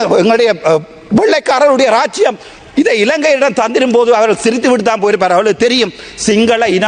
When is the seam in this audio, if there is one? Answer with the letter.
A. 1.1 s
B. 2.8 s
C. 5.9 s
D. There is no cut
D